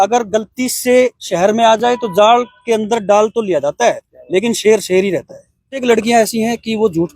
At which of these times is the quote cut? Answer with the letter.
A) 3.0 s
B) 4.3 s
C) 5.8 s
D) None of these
C